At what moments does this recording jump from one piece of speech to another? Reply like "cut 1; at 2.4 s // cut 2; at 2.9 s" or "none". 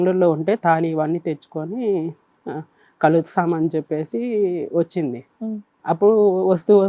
none